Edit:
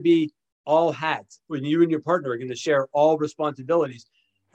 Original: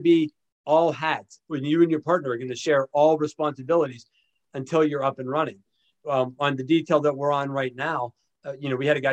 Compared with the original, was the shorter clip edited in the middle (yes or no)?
no